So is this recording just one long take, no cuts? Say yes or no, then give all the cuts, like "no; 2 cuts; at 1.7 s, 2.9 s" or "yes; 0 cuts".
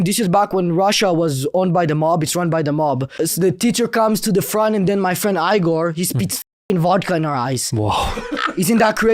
no; 1 cut; at 3.1 s